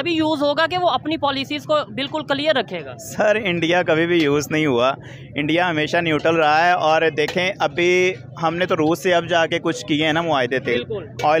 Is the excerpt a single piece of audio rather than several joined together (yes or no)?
yes